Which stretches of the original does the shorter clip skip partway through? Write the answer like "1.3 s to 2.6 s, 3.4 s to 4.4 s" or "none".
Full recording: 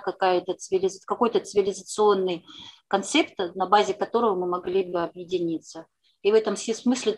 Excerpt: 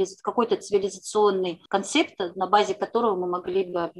2.4 s to 2.8 s